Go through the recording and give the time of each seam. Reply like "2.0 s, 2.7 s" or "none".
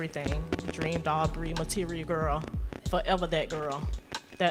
none